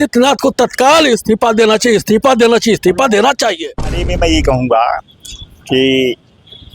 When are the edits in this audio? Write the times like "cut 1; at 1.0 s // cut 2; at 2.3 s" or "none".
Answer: cut 1; at 4.1 s